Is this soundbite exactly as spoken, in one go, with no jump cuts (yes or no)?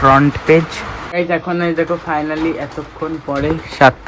no